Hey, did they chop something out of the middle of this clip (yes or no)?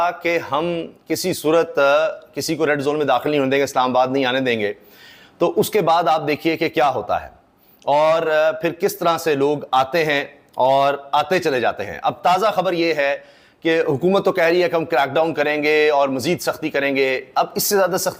no